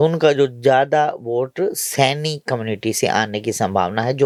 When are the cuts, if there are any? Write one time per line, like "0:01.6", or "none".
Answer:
none